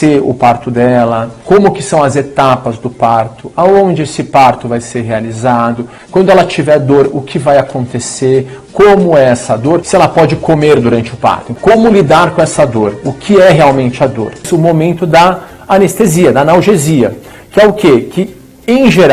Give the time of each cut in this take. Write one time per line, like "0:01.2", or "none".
0:05.9
0:09.8
0:11.5
0:14.5

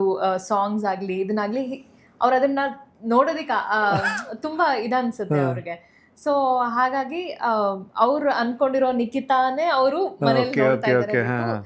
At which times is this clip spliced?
none

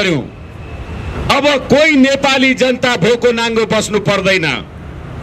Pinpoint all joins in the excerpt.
none

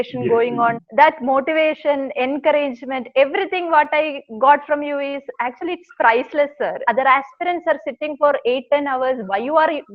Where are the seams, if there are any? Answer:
0:00.8
0:06.8

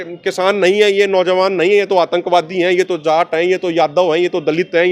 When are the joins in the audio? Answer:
none

